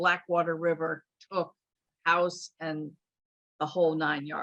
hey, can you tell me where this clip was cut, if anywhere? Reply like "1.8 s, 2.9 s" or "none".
none